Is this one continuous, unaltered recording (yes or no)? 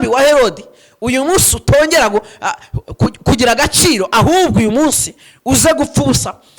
yes